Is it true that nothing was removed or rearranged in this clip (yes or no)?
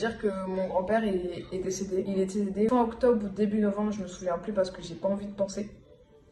yes